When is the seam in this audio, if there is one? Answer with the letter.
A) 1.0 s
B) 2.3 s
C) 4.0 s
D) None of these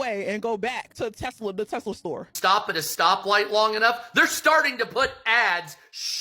B